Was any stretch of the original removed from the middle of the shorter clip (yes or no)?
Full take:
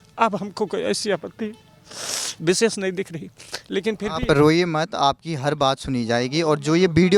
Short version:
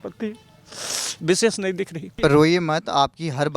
yes